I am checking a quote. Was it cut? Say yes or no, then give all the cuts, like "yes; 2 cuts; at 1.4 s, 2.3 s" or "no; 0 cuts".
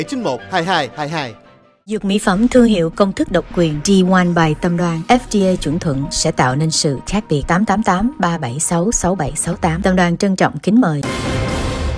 yes; 1 cut; at 11.0 s